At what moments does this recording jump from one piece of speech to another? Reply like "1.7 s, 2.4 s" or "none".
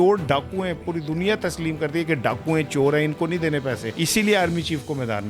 3.9 s